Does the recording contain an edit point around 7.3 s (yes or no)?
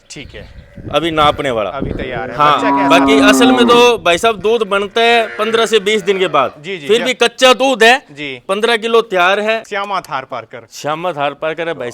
no